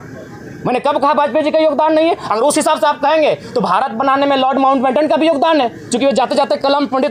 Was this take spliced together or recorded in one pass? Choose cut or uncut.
uncut